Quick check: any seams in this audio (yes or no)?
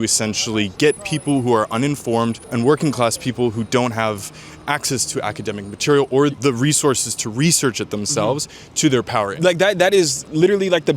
yes